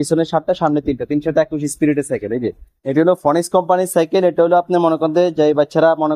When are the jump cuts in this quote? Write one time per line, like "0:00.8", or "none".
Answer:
0:02.7